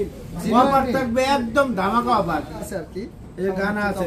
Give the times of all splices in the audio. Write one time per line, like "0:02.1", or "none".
0:02.7